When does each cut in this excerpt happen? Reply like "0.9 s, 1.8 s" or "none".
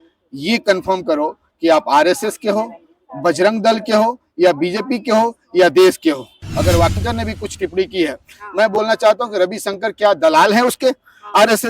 7.0 s